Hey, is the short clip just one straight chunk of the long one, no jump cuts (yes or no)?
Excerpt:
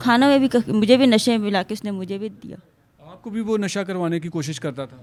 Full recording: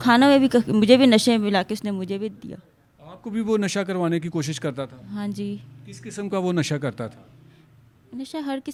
yes